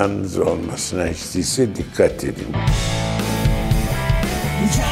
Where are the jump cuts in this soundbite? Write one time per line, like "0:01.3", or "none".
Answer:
0:02.6